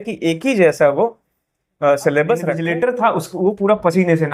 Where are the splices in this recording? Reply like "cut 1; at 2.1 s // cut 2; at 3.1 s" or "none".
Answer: cut 1; at 2.6 s